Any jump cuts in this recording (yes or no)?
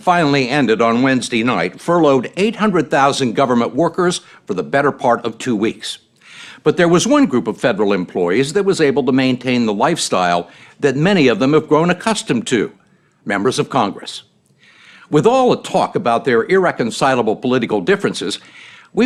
no